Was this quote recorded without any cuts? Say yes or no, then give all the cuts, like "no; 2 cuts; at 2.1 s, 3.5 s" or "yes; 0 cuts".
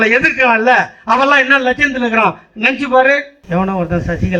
no; 1 cut; at 3.4 s